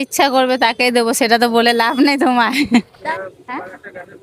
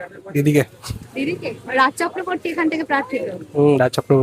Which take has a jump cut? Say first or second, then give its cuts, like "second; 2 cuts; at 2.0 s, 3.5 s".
first; 1 cut; at 3.0 s